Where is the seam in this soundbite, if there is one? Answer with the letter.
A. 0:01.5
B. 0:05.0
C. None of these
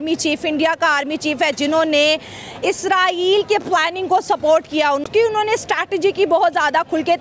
B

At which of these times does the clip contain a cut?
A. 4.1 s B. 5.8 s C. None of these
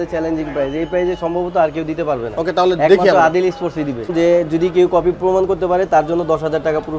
A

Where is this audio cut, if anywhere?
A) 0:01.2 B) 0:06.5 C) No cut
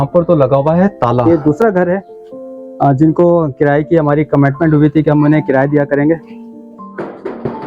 A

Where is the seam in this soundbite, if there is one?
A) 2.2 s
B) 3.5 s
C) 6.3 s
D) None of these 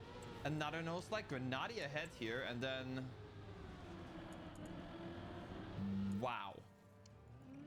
D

